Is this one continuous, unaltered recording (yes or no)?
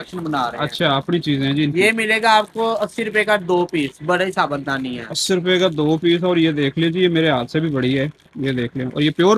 yes